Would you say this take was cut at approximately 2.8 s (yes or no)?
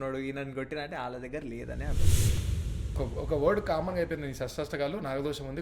yes